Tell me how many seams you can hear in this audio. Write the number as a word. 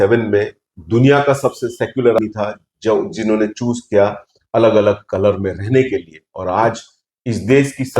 one